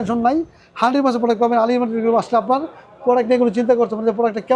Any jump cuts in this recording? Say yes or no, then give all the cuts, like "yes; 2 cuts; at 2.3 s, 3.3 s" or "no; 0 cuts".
no; 0 cuts